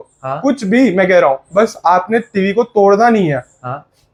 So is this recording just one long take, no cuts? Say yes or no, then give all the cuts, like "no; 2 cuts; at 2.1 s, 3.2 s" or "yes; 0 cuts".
yes; 0 cuts